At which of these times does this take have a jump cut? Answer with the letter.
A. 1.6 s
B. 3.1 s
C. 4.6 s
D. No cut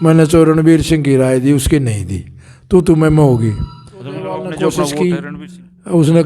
C